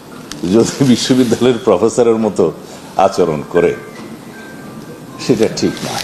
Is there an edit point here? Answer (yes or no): no